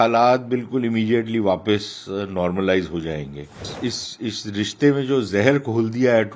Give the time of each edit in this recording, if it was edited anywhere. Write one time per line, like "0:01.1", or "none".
0:03.7

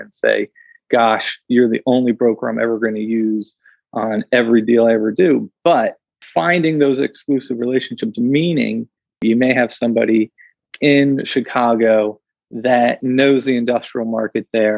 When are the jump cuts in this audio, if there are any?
0:09.2

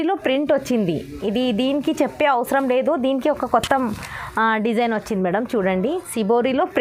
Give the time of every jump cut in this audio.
none

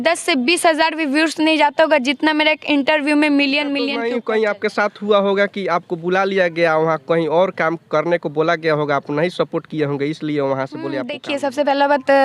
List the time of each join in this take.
0:04.0
0:11.2

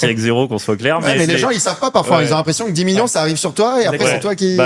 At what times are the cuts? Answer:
none

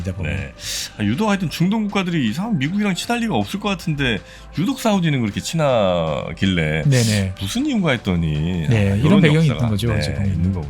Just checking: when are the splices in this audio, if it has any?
none

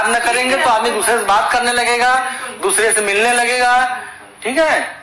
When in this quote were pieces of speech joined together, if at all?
none

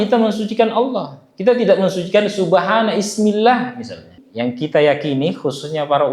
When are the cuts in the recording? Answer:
0:04.2

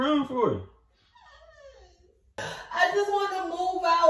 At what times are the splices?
0:02.4

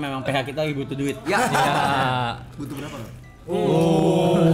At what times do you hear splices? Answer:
none

